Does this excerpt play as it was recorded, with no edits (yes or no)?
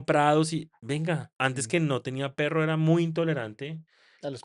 no